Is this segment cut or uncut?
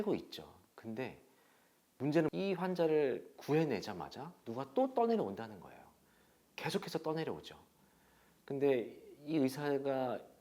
cut